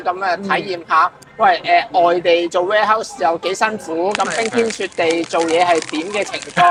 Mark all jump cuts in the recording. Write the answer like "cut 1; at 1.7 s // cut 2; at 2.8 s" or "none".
none